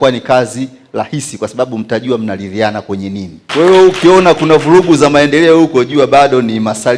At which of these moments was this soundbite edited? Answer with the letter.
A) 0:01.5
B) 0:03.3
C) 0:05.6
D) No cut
B